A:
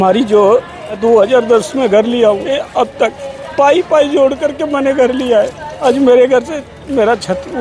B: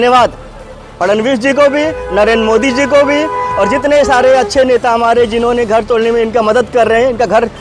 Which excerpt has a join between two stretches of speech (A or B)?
A